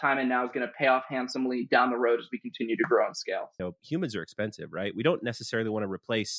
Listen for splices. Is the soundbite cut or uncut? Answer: cut